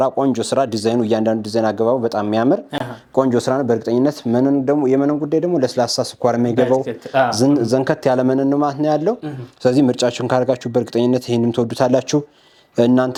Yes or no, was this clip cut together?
no